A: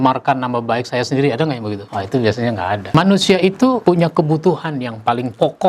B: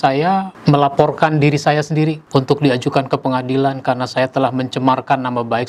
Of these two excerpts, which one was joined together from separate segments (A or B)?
A